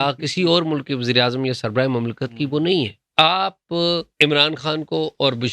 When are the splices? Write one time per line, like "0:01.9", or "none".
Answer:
0:03.1
0:04.1